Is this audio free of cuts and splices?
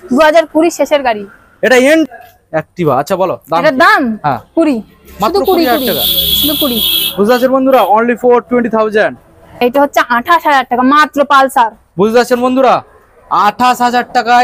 no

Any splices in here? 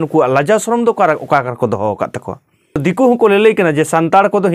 yes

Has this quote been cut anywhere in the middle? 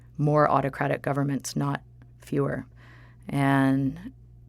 yes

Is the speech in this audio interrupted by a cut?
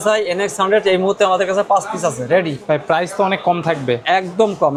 no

